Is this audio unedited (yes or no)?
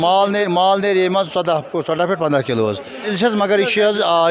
no